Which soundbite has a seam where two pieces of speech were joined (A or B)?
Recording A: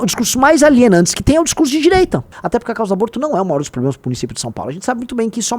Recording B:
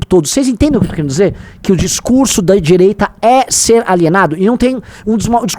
A